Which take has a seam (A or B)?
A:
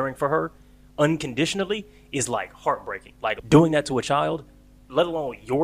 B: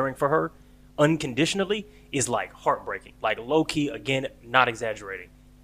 A